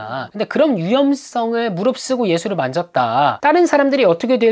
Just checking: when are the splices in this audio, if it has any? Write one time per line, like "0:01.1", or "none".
0:03.4